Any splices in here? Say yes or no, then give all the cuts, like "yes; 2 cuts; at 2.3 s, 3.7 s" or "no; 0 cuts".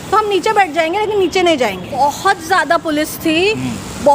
yes; 1 cut; at 2.0 s